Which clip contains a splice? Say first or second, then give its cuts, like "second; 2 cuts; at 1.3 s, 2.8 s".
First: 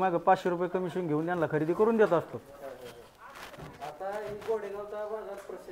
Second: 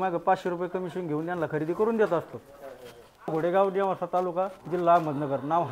second; 1 cut; at 3.3 s